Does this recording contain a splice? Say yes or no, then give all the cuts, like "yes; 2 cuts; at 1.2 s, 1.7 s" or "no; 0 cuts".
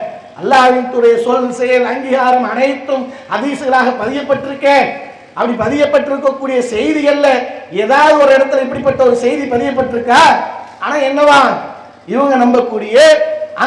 no; 0 cuts